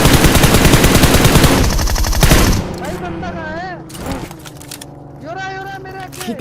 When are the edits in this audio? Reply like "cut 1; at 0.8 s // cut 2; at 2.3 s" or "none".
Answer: none